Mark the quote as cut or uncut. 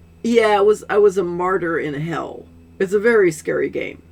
uncut